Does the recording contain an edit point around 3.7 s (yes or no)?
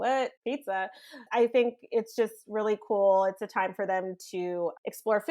no